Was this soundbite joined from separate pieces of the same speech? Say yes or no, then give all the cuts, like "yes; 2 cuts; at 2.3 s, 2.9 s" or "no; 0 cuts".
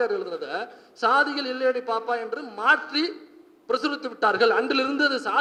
no; 0 cuts